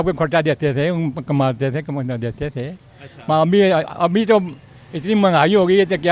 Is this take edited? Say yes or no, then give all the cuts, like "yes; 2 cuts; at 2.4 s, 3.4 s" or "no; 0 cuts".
no; 0 cuts